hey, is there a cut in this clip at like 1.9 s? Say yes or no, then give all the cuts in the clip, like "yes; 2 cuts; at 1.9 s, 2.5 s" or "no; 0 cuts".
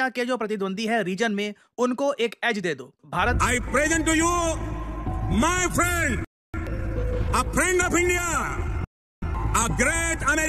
no; 1 cut; at 3.4 s